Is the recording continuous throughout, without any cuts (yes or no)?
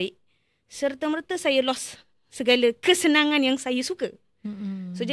yes